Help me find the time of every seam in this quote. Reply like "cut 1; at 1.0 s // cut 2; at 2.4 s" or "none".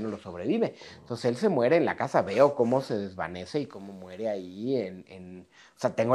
none